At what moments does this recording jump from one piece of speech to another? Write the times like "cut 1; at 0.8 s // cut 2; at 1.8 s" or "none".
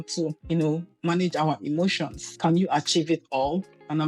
cut 1; at 2.3 s